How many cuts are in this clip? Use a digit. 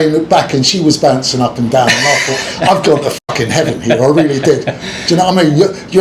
0